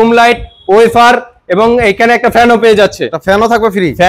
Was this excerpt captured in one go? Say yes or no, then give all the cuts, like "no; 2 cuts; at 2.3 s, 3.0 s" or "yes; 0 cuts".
yes; 0 cuts